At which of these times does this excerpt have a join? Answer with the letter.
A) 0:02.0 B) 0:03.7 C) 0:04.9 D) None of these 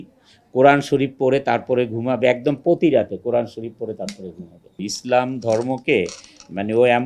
C